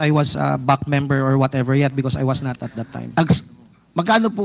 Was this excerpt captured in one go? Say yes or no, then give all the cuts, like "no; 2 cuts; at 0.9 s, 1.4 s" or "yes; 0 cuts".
no; 1 cut; at 3.2 s